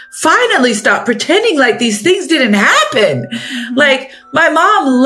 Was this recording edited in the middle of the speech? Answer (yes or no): no